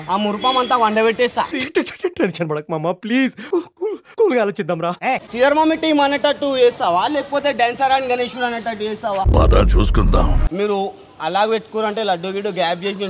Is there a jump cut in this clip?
yes; 2 cuts; at 5.2 s, 10.4 s

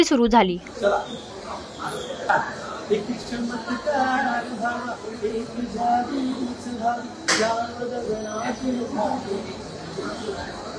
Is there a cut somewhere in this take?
no; 0 cuts

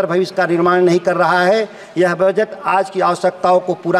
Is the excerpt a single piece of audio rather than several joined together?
yes; 0 cuts

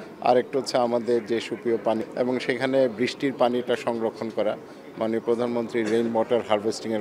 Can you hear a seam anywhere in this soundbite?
yes; 1 cut; at 2.0 s

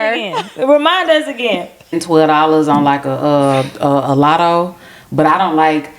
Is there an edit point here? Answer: yes; 1 cut; at 2.0 s

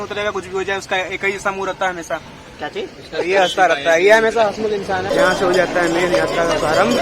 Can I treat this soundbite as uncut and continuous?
no; 1 cut; at 5.1 s

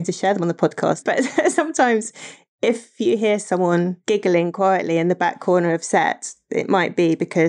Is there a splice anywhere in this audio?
yes; 2 cuts; at 1.0 s, 4.0 s

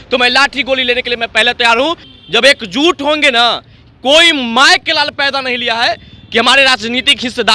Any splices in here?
yes; 1 cut; at 2.0 s

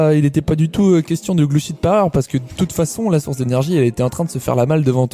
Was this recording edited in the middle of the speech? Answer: no; 0 cuts

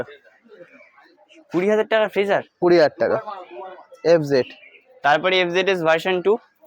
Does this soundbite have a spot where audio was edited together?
no; 0 cuts

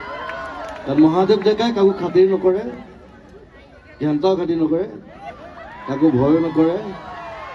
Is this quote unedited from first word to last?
yes; 0 cuts

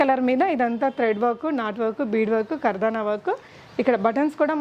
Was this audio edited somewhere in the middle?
no; 0 cuts

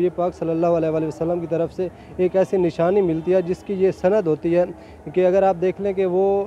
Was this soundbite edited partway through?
no; 0 cuts

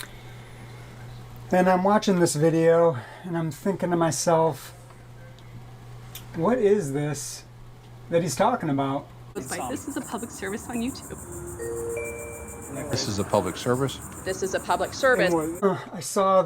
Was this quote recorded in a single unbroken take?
no; 2 cuts; at 9.4 s, 15.5 s

